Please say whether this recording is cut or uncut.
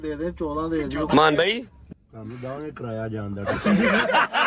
cut